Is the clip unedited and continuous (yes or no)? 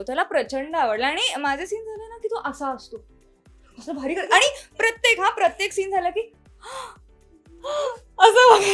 yes